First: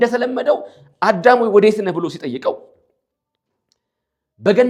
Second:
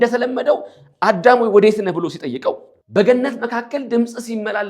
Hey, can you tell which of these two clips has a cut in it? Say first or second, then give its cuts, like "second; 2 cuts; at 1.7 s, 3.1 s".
second; 1 cut; at 2.7 s